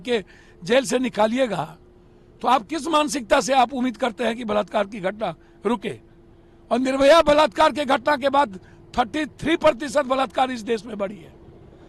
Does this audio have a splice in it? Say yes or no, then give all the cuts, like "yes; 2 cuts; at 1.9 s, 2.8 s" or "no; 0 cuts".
no; 0 cuts